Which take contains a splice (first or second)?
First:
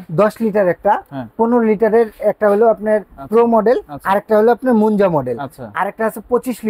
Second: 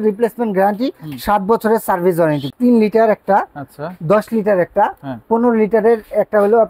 second